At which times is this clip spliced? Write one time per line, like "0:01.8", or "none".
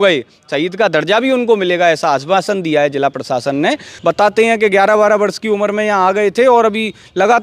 0:03.9